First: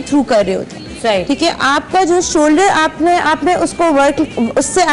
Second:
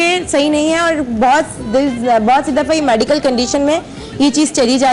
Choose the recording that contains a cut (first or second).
second